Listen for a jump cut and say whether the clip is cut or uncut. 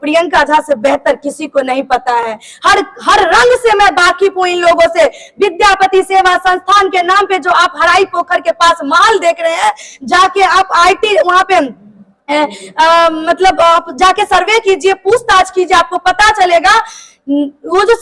uncut